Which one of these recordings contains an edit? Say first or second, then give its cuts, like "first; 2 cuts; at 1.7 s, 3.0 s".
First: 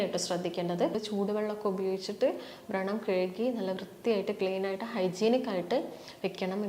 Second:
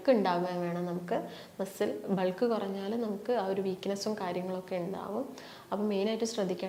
first; 1 cut; at 0.9 s